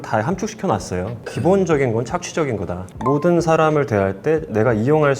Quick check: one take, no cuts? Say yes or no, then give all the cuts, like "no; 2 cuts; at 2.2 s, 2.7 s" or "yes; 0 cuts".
no; 2 cuts; at 1.2 s, 2.9 s